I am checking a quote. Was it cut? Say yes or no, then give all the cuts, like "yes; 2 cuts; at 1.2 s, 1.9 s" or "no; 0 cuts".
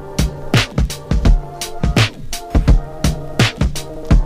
no; 0 cuts